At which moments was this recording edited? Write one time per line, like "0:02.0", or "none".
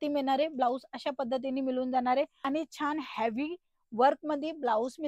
0:02.5